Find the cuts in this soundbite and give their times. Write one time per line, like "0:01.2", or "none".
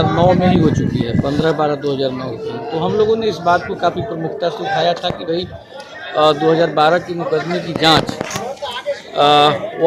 none